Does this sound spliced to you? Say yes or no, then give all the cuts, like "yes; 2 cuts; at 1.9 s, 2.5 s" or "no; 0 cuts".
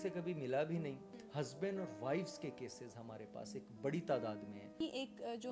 yes; 2 cuts; at 1.0 s, 4.8 s